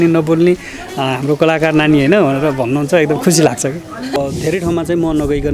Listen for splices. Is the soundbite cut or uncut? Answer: cut